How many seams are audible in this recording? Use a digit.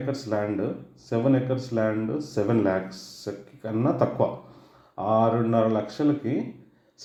0